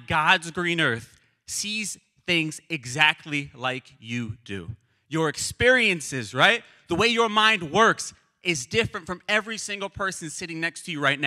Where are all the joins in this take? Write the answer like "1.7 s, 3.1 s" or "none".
none